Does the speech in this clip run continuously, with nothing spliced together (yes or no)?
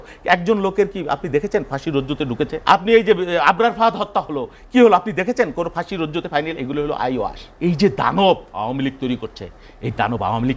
no